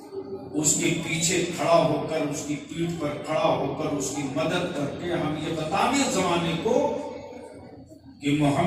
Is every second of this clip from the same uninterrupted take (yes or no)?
yes